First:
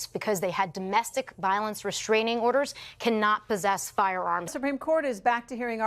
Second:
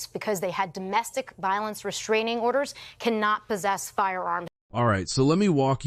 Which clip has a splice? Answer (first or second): first